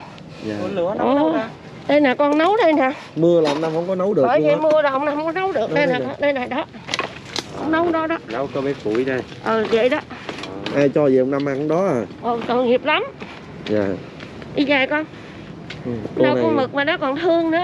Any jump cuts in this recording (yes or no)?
no